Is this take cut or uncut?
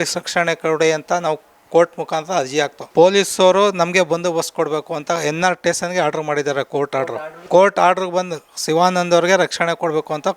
cut